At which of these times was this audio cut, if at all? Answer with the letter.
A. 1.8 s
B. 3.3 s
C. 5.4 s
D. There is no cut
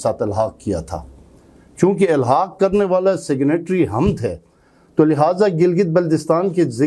D